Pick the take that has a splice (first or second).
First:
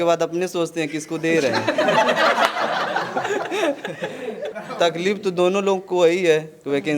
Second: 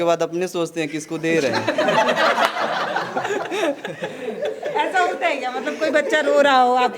first